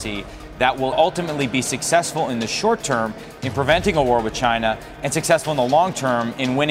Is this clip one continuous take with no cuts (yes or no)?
no